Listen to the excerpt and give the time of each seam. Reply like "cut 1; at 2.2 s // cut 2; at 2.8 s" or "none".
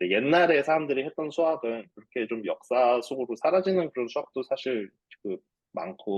none